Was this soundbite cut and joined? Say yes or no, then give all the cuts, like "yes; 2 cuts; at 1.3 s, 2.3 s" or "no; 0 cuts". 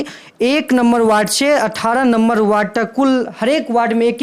no; 0 cuts